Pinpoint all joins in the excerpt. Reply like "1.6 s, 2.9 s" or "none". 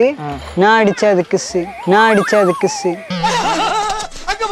none